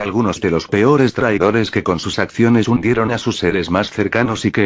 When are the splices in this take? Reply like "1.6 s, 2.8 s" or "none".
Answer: 3.4 s